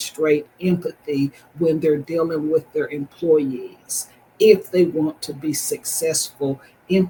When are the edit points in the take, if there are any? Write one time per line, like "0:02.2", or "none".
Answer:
none